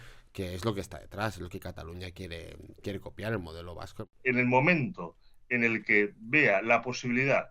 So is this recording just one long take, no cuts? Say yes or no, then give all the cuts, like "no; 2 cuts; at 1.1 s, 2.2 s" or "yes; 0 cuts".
no; 1 cut; at 4.1 s